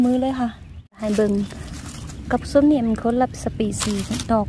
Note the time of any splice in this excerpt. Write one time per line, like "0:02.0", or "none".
0:00.9